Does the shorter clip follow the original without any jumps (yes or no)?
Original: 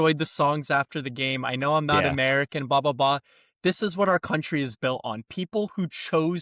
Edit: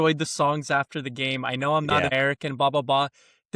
no